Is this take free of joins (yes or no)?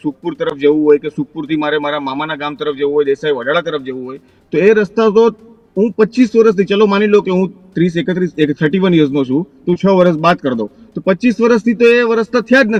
yes